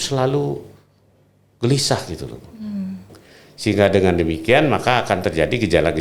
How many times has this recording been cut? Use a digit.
1